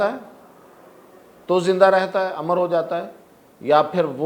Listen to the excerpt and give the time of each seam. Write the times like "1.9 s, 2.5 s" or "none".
none